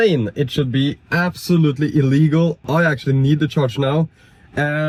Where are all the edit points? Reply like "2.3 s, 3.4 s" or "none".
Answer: none